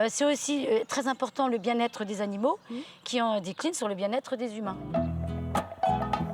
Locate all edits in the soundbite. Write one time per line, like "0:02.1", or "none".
none